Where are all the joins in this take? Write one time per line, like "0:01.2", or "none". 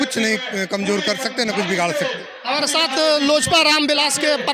none